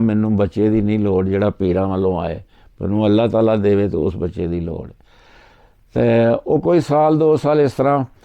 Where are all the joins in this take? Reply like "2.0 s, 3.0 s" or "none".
none